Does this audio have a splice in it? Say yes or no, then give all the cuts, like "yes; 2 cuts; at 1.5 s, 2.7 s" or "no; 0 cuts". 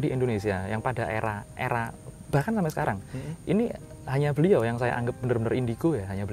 no; 0 cuts